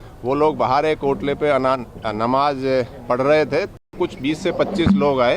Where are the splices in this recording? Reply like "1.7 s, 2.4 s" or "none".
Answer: 3.9 s